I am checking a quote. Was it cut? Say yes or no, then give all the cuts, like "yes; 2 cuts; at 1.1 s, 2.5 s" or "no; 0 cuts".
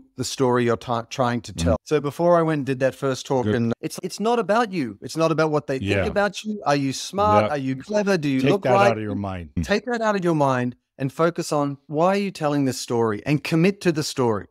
no; 0 cuts